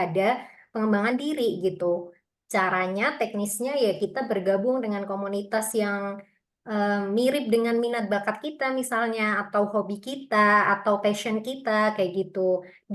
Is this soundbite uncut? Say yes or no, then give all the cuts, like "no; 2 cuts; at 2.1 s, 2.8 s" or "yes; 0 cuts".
yes; 0 cuts